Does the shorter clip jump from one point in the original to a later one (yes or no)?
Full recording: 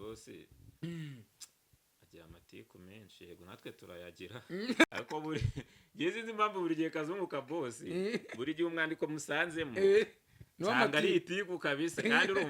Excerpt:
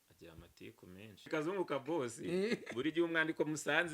yes